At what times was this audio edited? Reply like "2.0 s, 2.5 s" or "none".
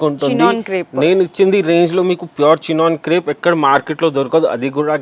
none